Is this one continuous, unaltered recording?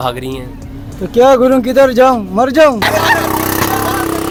yes; 0 cuts

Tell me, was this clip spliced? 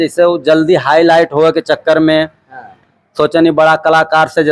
no; 0 cuts

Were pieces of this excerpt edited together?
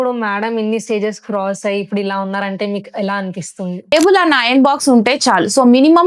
yes; 1 cut; at 3.9 s

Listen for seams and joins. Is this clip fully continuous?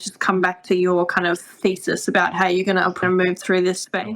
no; 1 cut; at 3.0 s

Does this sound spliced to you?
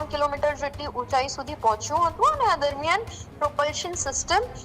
no; 0 cuts

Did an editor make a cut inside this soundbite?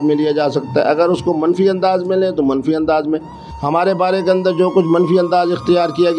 yes; 1 cut; at 3.4 s

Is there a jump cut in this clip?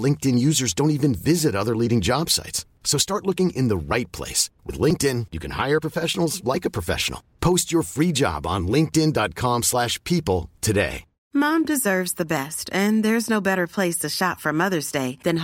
yes; 1 cut; at 11.1 s

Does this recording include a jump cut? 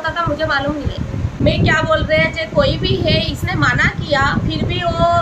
yes; 1 cut; at 1.4 s

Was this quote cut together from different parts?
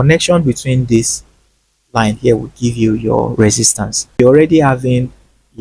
yes; 1 cut; at 4.2 s

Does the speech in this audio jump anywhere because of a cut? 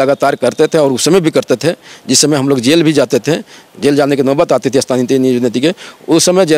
no; 0 cuts

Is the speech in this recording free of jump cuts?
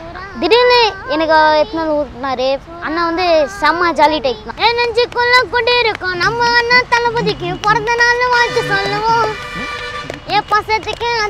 no; 2 cuts; at 2.7 s, 4.5 s

